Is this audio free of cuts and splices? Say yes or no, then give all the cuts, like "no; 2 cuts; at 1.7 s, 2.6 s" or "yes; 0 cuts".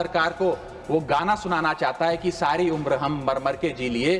yes; 0 cuts